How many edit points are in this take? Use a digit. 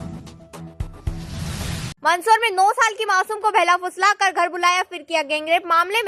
1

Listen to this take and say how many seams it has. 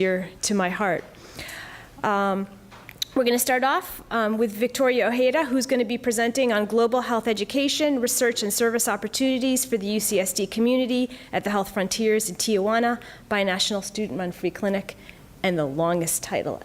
1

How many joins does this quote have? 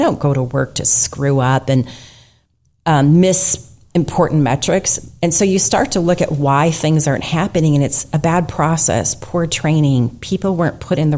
0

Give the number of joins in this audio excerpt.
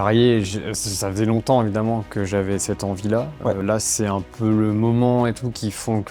1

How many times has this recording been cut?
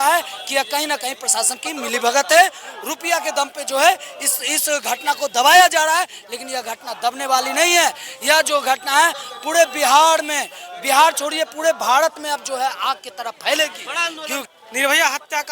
1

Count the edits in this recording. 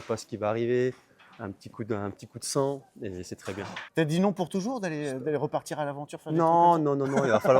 1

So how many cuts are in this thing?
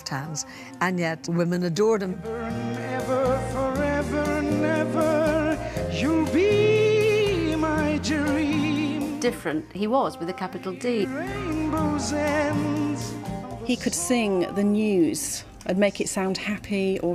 0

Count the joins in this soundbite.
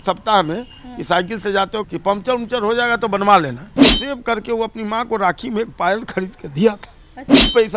2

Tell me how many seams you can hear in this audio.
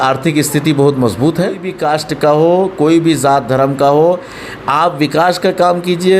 1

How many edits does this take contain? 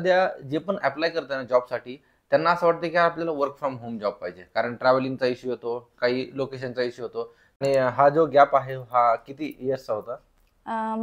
1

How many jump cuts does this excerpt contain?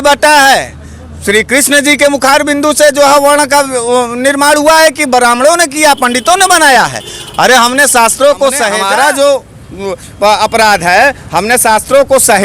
1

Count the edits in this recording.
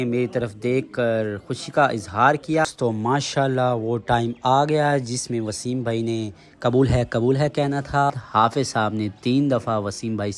2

